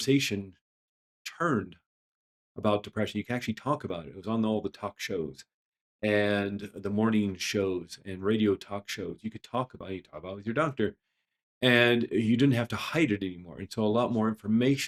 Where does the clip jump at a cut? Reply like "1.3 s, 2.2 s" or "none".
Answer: none